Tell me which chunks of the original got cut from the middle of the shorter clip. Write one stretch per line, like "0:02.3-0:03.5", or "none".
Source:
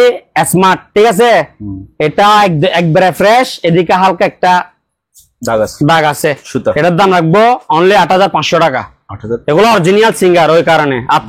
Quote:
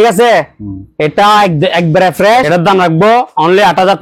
0:03.5-0:06.8